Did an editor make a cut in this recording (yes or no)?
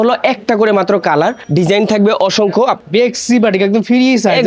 yes